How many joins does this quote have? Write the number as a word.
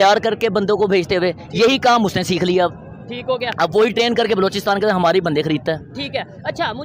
zero